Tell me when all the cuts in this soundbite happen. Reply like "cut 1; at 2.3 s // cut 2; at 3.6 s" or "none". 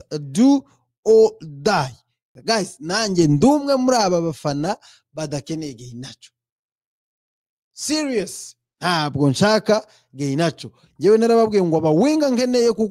cut 1; at 2.3 s